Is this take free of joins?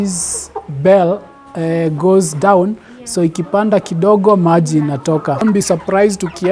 no; 1 cut; at 5.4 s

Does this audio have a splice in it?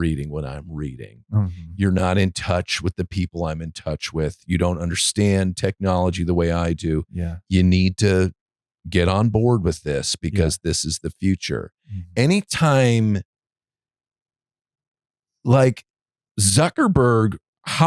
no; 0 cuts

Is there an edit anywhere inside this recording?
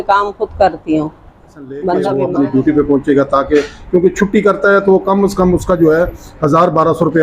yes; 1 cut; at 2.2 s

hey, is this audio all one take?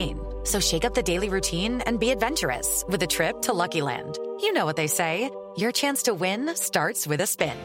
yes; 0 cuts

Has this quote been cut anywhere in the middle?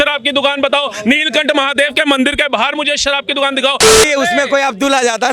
yes; 1 cut; at 4.0 s

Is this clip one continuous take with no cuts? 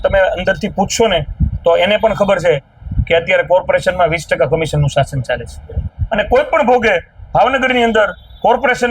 no; 1 cut; at 5.8 s

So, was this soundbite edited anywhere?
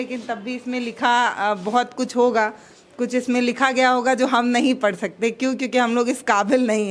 no; 0 cuts

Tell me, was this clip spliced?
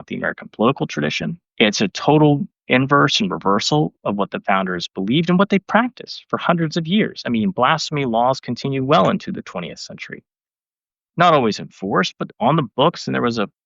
yes; 1 cut; at 10.9 s

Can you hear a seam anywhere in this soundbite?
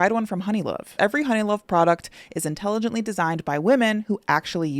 yes; 1 cut; at 1.0 s

